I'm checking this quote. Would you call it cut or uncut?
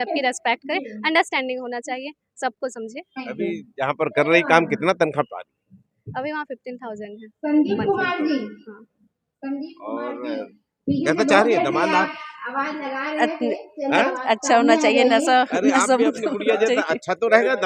uncut